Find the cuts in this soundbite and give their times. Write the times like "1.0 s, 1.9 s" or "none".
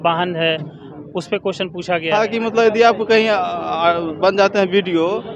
2.1 s

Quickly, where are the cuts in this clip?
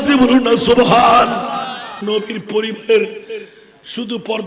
1.9 s

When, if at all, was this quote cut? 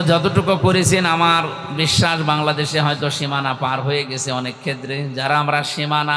none

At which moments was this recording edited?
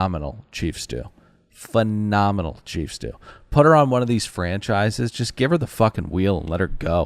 none

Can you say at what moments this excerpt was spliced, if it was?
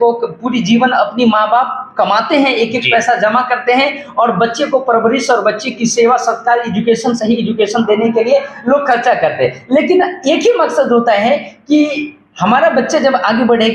none

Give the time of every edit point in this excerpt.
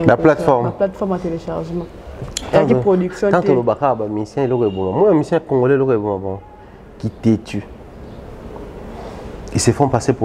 none

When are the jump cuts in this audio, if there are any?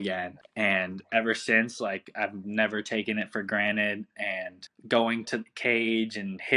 4.7 s

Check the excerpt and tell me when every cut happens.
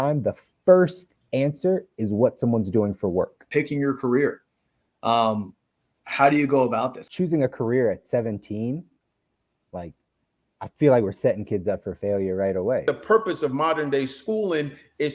3.5 s, 7.0 s, 12.8 s

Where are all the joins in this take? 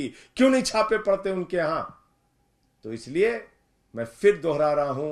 none

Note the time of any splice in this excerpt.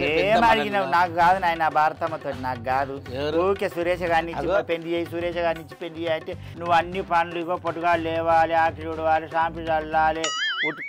6.5 s

